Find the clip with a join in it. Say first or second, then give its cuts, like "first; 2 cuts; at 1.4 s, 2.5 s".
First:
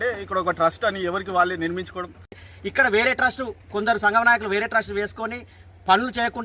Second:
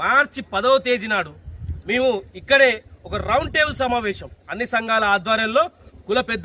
first; 1 cut; at 2.5 s